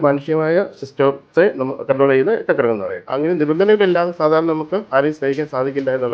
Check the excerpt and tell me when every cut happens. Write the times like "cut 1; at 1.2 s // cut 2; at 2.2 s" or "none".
cut 1; at 3.0 s